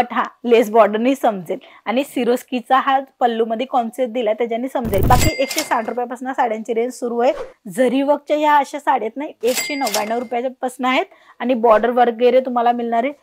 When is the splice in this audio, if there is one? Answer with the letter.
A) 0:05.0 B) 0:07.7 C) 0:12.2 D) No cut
A